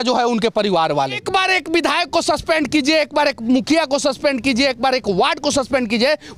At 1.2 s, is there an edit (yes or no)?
yes